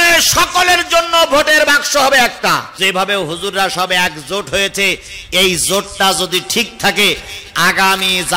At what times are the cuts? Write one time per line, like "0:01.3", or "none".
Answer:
0:02.7